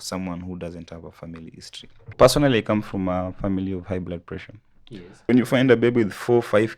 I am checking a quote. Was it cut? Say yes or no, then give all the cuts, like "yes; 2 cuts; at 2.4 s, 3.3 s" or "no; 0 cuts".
yes; 2 cuts; at 2.1 s, 5.3 s